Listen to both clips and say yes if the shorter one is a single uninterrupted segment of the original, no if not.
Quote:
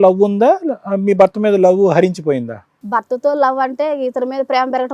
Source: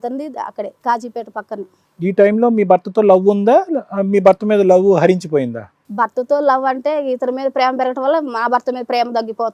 yes